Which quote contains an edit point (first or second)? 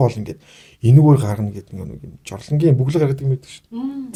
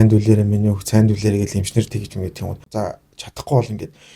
second